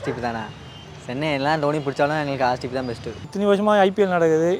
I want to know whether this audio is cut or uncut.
cut